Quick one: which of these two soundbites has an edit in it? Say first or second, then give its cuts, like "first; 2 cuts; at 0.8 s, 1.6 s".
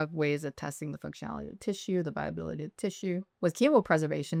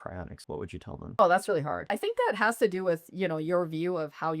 second; 2 cuts; at 0.8 s, 1.9 s